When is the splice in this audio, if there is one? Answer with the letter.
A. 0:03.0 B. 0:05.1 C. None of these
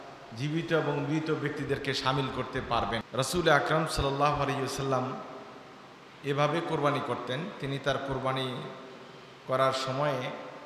A